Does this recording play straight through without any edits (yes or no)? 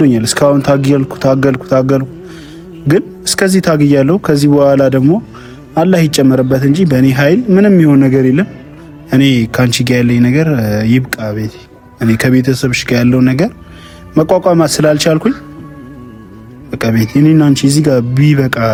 yes